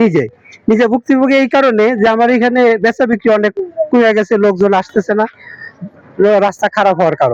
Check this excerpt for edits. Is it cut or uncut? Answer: uncut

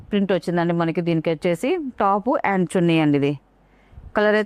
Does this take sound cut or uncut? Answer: uncut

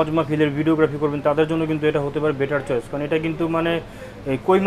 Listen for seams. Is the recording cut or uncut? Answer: uncut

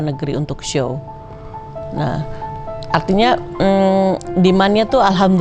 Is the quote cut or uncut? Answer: uncut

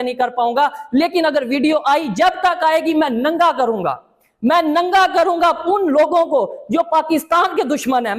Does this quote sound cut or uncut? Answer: uncut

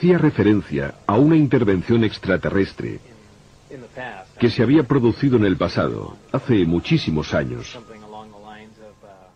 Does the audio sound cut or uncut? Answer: uncut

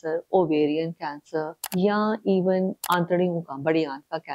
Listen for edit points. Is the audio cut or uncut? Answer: cut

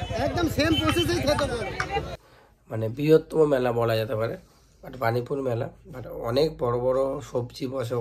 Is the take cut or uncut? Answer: cut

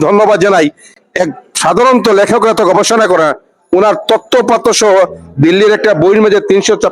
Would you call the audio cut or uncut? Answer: uncut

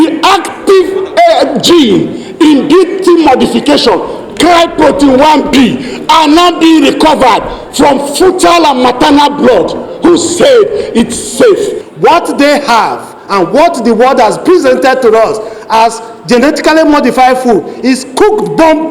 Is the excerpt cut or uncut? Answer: cut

